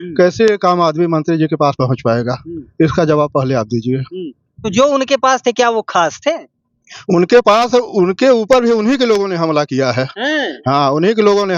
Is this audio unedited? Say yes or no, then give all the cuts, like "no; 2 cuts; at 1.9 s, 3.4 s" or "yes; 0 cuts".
yes; 0 cuts